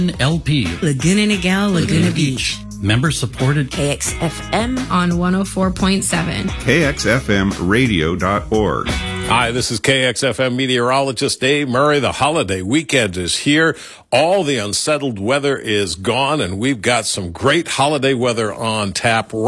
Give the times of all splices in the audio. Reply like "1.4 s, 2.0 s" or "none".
9.0 s